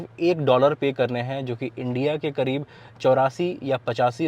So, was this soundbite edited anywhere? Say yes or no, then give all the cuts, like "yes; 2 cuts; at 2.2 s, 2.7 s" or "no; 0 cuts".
no; 0 cuts